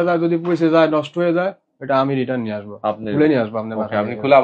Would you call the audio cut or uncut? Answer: uncut